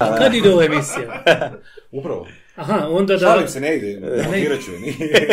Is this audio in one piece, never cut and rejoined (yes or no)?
yes